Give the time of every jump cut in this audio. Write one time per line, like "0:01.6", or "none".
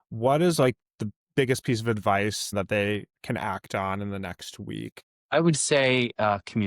0:02.5
0:05.1